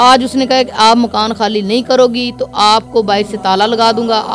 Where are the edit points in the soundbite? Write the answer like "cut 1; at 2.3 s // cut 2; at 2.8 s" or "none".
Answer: none

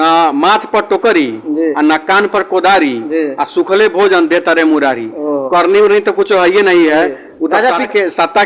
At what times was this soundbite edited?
none

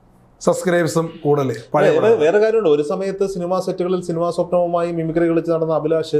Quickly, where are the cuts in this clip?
none

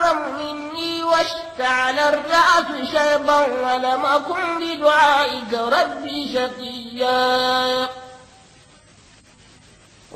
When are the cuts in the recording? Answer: none

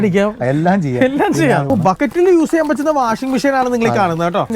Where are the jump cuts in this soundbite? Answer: cut 1; at 1.7 s

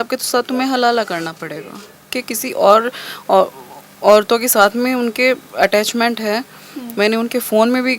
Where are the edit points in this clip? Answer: cut 1; at 2.2 s

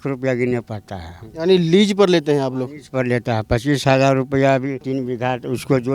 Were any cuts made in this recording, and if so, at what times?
cut 1; at 4.8 s

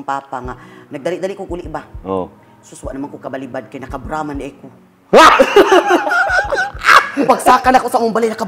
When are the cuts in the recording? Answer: none

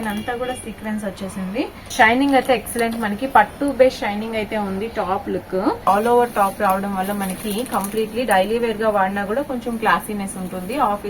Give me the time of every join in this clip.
cut 1; at 1.9 s // cut 2; at 5.9 s

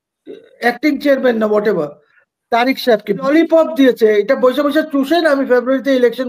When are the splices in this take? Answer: cut 1; at 3.3 s

